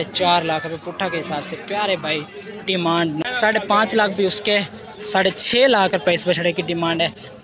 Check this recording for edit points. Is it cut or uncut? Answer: cut